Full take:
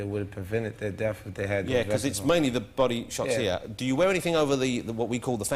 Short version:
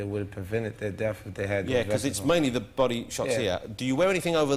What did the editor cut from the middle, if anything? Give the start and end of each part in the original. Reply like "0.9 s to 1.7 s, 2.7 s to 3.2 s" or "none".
none